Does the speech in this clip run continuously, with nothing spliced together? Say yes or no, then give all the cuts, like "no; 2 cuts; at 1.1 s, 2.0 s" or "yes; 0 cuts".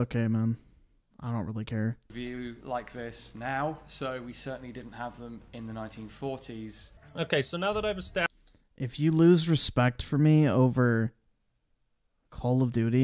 yes; 0 cuts